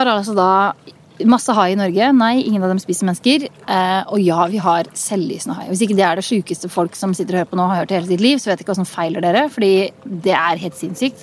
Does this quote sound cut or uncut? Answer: uncut